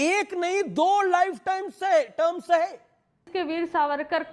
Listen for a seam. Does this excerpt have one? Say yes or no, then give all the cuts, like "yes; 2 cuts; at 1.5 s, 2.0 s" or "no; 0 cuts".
yes; 1 cut; at 3.3 s